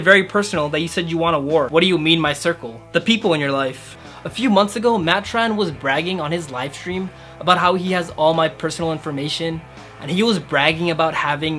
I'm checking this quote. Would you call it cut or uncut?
cut